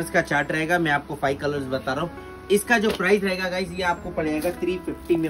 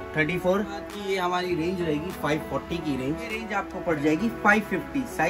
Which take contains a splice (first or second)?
second